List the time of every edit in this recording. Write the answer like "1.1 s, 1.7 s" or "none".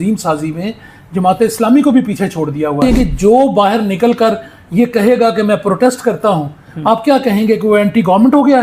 2.8 s